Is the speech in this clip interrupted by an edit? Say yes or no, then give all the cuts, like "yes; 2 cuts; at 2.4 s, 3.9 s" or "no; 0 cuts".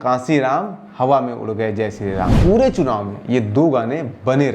yes; 1 cut; at 2.3 s